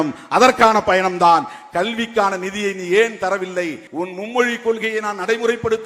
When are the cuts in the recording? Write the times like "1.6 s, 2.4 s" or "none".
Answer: 3.8 s